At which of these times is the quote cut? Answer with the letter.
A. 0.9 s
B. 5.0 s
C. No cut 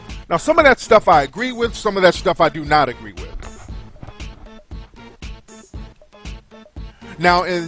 B